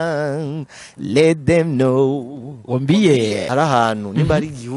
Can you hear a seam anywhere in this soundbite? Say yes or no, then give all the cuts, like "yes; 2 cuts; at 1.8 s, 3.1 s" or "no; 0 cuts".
yes; 1 cut; at 3.4 s